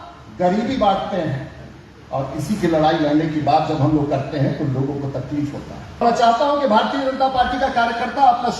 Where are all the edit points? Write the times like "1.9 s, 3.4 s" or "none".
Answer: 6.0 s